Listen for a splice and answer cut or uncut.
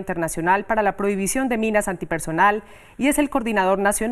uncut